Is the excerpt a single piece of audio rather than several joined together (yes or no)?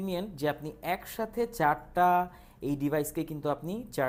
yes